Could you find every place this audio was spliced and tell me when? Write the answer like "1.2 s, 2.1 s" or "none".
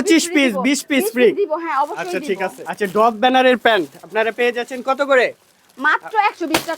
2.6 s

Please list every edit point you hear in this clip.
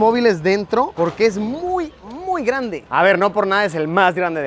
none

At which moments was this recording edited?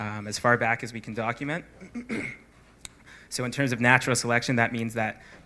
none

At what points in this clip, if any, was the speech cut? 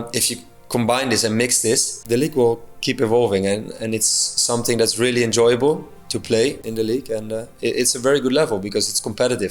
2.0 s, 6.6 s

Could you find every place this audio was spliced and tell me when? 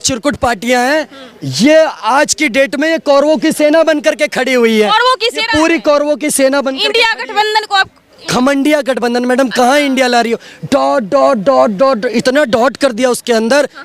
none

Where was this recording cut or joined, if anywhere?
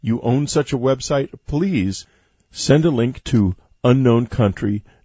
none

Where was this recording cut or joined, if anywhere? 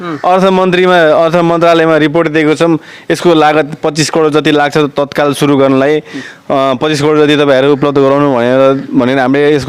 none

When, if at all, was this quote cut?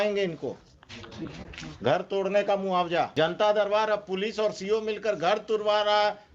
3.1 s

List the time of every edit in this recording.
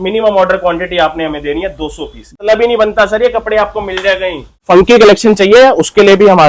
2.4 s, 4.6 s

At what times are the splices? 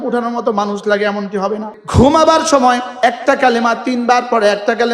1.7 s, 2.9 s

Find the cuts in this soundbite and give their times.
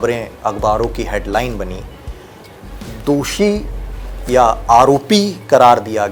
none

